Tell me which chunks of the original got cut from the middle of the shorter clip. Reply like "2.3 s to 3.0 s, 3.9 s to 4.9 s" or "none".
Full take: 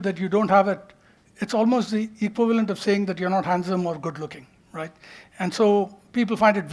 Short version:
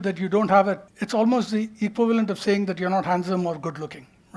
0.9 s to 1.3 s